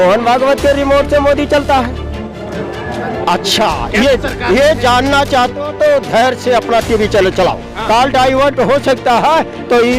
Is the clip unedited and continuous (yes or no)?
no